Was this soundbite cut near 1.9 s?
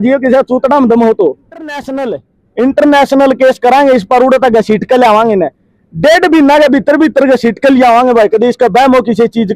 yes; 1 cut; at 1.9 s

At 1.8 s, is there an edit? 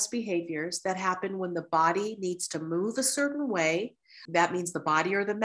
no; 1 cut; at 4.2 s

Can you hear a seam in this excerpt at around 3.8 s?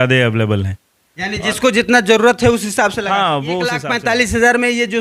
yes; 1 cut; at 3.8 s

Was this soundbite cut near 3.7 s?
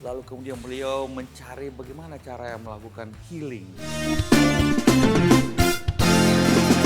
no; 0 cuts

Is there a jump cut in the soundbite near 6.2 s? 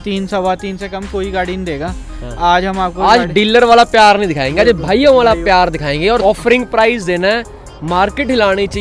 yes; 1 cut; at 6.2 s

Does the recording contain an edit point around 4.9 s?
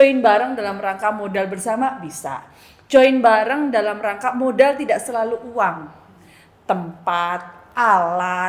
no; 0 cuts

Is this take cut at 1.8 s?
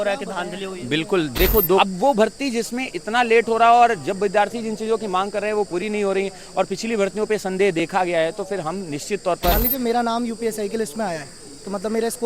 yes; 2 cuts; at 1.8 s, 9.6 s

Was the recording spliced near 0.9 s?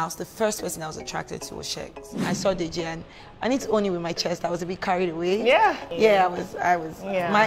no; 2 cuts; at 2.2 s, 5.8 s

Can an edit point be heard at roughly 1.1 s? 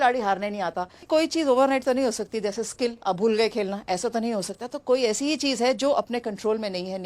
yes; 1 cut; at 1.1 s

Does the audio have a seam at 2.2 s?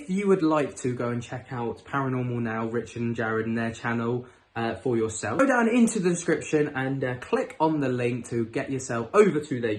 no; 0 cuts

